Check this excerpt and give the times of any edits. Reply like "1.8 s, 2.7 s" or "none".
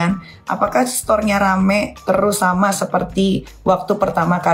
none